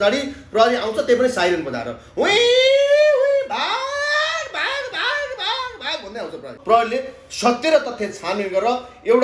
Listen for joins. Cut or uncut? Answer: cut